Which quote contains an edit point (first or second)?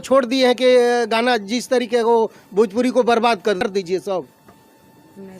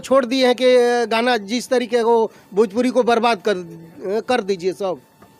first